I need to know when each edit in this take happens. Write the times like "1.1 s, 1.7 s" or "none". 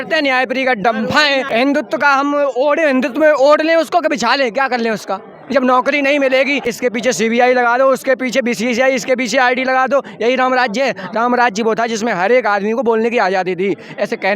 1.5 s, 6.7 s